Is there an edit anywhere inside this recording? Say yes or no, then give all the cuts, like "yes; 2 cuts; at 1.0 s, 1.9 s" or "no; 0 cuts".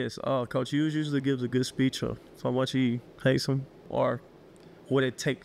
yes; 2 cuts; at 2.3 s, 3.8 s